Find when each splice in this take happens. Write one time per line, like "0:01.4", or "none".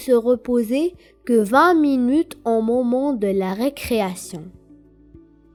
none